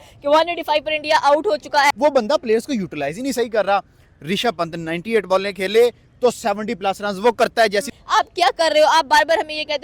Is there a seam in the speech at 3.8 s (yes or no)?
no